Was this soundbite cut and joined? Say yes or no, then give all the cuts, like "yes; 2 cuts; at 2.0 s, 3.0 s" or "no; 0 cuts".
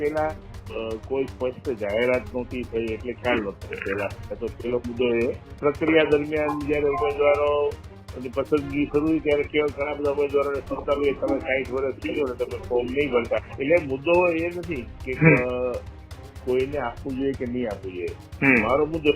yes; 2 cuts; at 5.5 s, 13.4 s